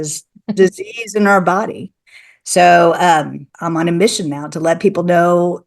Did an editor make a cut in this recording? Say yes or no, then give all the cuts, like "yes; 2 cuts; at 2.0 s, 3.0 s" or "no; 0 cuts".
yes; 1 cut; at 3.4 s